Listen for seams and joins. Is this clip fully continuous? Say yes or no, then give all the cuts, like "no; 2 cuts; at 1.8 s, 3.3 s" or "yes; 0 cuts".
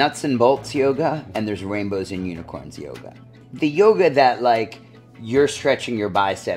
no; 1 cut; at 3.4 s